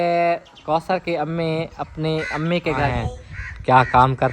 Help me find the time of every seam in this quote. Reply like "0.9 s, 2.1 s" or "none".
2.9 s